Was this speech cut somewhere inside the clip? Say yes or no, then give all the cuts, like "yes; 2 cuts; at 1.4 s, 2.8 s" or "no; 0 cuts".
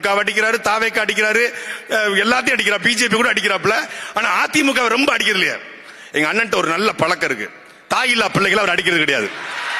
no; 0 cuts